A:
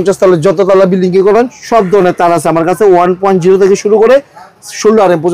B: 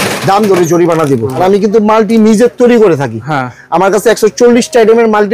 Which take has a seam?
B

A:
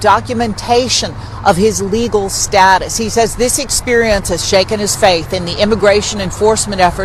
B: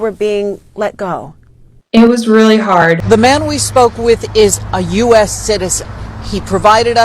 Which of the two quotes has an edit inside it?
B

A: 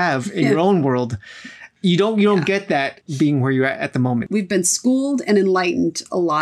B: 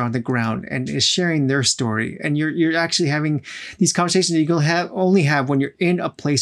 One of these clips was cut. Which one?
A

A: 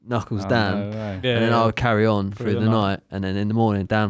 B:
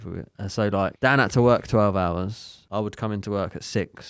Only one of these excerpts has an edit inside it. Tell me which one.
B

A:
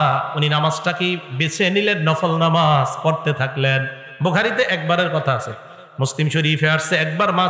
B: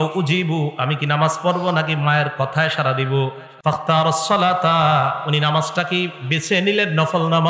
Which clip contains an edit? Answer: B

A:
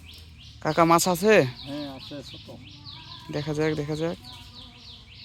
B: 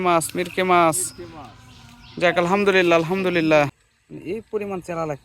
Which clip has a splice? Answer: B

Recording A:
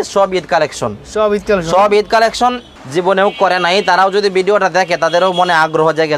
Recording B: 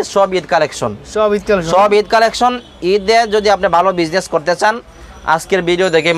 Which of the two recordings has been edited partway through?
A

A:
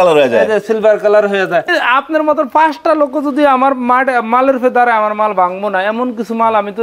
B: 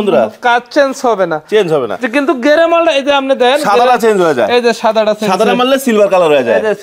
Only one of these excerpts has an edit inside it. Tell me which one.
A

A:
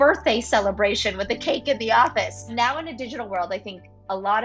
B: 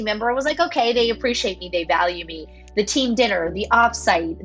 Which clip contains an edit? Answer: A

